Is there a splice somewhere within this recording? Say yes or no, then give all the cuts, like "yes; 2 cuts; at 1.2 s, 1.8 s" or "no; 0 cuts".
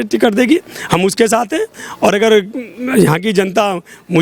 no; 0 cuts